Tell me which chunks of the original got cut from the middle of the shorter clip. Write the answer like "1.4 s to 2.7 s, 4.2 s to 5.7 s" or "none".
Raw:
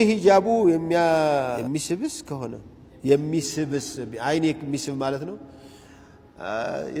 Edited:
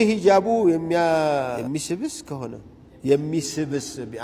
none